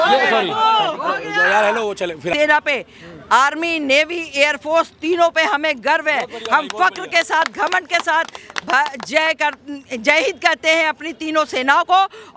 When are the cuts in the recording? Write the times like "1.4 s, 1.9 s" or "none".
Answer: 2.3 s